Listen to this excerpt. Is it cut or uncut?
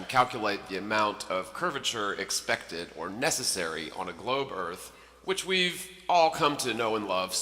cut